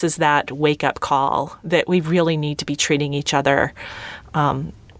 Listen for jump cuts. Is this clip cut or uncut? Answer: uncut